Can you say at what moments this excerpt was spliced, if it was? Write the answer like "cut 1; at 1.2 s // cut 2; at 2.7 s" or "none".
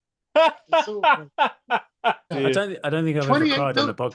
cut 1; at 2.3 s